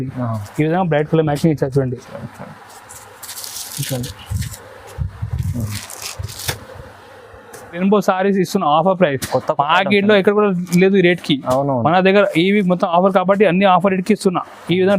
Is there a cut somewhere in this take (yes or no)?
yes